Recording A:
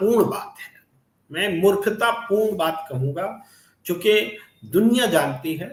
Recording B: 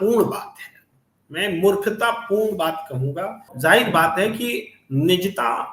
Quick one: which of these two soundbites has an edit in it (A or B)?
B